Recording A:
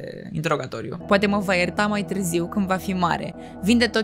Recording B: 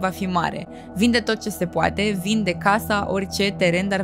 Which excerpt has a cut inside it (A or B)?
A